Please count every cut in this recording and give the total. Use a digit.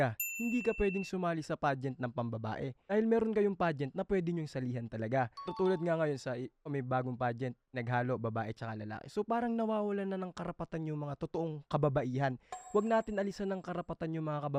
0